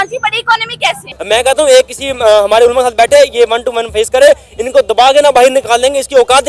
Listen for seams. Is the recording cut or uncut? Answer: cut